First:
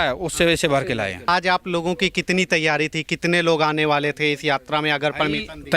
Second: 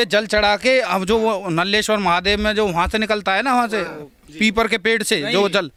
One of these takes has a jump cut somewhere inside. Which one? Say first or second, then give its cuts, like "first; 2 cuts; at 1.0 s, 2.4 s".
first; 1 cut; at 1.3 s